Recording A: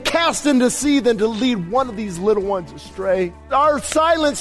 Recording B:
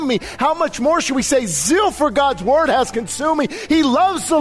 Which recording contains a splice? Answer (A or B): A